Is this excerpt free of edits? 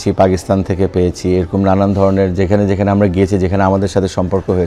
yes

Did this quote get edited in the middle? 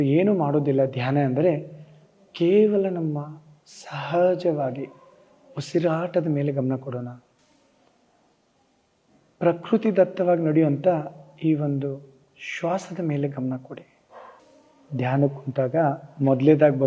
no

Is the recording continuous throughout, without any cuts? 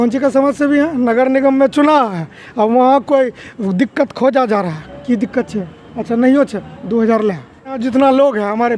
no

